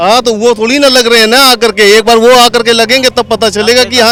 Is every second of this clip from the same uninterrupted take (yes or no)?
yes